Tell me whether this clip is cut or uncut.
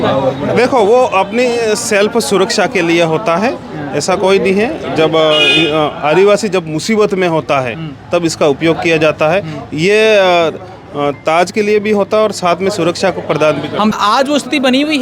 cut